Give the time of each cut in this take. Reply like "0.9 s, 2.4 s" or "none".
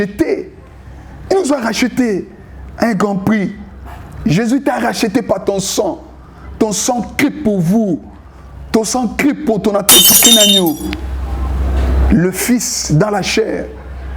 10.1 s